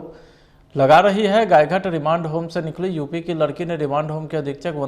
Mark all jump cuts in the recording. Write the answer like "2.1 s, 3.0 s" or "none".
none